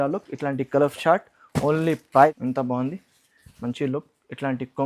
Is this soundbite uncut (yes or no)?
no